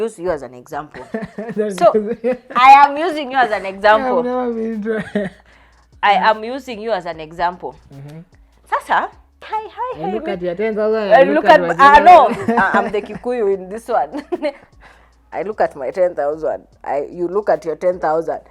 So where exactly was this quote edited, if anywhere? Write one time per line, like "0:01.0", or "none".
0:09.5